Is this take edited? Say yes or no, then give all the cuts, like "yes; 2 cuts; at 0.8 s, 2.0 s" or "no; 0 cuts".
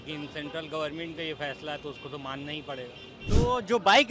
yes; 1 cut; at 3.1 s